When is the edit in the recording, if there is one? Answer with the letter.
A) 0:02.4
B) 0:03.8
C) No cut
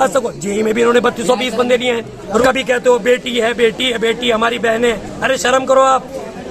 A